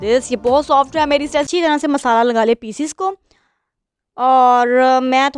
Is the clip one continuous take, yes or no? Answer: no